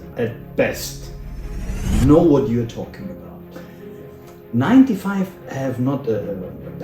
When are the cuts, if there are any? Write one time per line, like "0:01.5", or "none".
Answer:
none